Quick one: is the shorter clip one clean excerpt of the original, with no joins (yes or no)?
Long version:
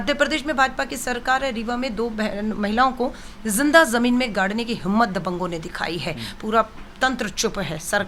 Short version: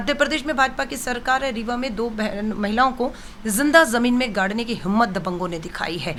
yes